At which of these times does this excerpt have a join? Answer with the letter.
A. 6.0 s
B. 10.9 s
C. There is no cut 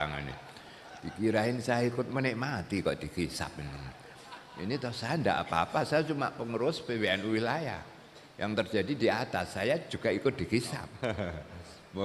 B